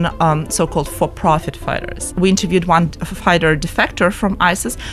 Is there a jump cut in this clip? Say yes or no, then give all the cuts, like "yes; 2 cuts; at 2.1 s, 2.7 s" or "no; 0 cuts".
yes; 1 cut; at 2.0 s